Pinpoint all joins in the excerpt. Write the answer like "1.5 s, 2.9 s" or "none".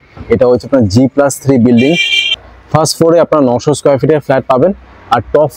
none

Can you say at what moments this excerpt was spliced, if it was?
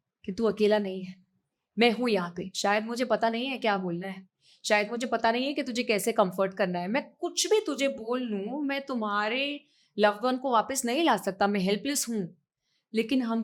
none

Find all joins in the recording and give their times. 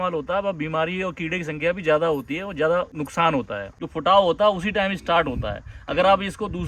3.7 s

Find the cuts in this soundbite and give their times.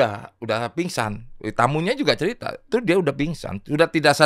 2.6 s

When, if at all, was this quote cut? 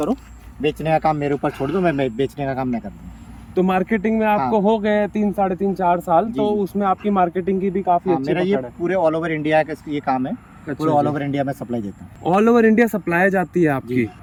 none

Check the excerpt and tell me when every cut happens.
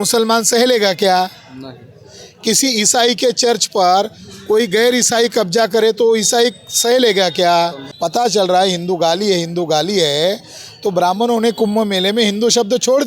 7.9 s

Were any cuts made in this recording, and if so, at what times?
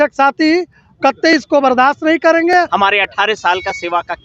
2.7 s

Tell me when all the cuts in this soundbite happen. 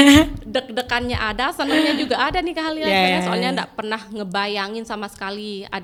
none

